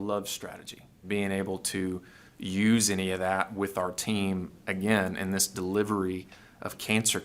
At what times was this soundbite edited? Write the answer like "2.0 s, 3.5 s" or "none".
1.0 s